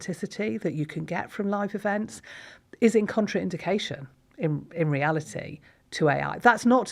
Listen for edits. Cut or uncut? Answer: uncut